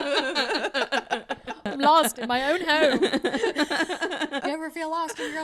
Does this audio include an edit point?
yes; 2 cuts; at 1.6 s, 4.4 s

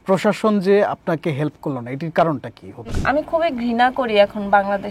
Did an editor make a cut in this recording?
yes; 1 cut; at 2.9 s

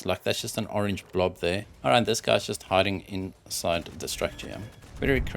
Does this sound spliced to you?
yes; 1 cut; at 1.7 s

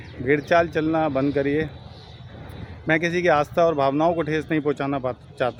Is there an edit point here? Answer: no; 0 cuts

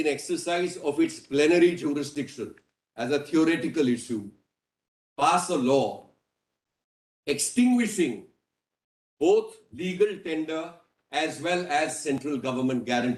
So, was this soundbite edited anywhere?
no; 0 cuts

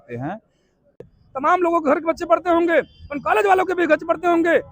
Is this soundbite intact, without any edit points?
no; 1 cut; at 1.0 s

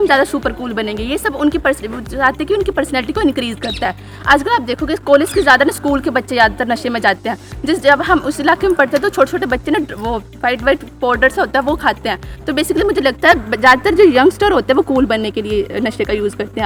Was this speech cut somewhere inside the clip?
no; 0 cuts

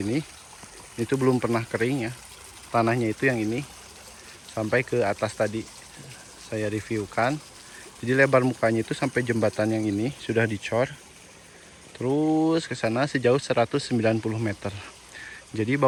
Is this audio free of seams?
yes; 0 cuts

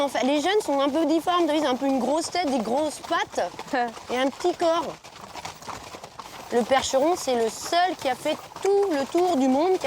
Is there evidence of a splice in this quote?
no; 0 cuts

